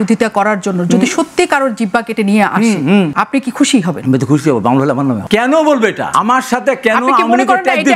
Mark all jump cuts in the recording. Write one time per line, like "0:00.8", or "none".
0:03.1
0:04.0
0:05.2
0:06.0